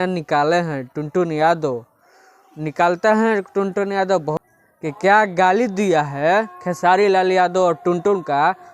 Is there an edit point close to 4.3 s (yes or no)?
yes